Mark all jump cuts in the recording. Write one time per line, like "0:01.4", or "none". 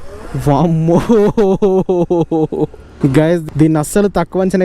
0:03.0